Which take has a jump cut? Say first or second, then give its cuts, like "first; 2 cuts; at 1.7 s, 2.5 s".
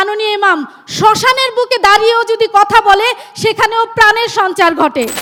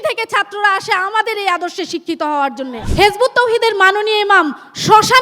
second; 1 cut; at 2.8 s